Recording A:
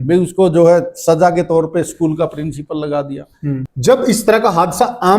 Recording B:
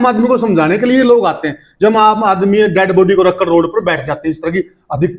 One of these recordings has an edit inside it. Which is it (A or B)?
A